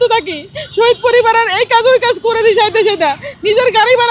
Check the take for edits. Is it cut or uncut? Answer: uncut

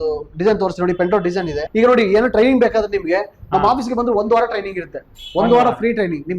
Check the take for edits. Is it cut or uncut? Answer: cut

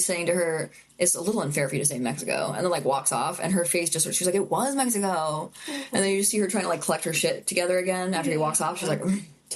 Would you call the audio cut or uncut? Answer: uncut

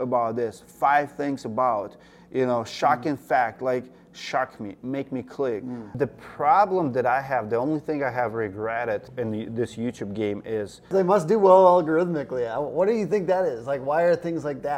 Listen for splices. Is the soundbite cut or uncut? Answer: cut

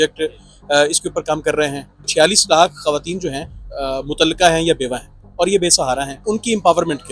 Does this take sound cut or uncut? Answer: cut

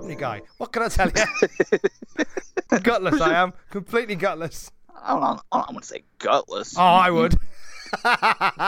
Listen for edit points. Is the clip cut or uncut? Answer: cut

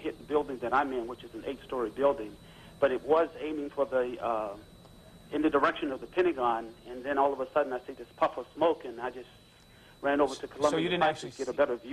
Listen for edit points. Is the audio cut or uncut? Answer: uncut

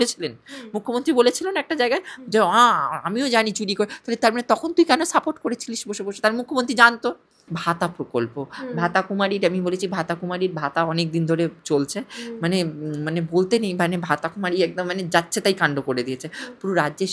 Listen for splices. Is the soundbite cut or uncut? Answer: cut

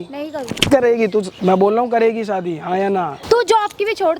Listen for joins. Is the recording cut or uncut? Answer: cut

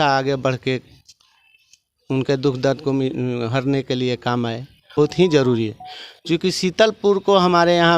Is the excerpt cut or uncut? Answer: cut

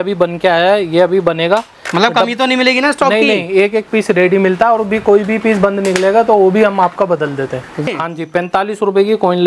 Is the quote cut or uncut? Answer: cut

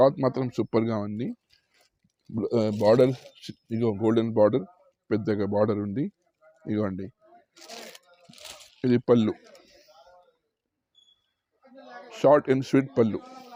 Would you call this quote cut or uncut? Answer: uncut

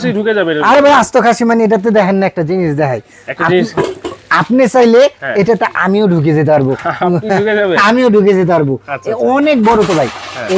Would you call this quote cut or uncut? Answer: uncut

